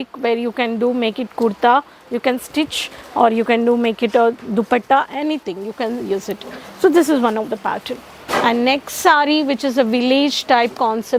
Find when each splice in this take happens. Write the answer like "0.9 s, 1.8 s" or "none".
none